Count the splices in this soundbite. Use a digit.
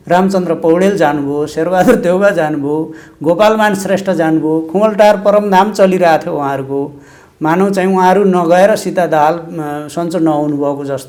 0